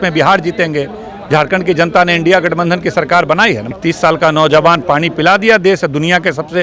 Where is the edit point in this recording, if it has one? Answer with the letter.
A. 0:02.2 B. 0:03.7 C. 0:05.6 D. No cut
B